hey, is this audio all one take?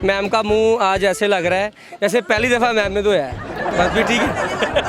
yes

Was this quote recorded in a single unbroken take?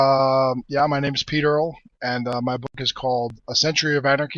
yes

